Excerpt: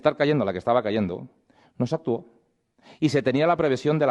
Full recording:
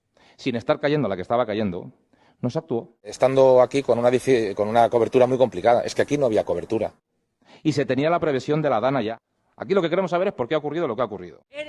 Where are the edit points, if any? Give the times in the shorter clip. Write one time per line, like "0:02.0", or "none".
0:02.4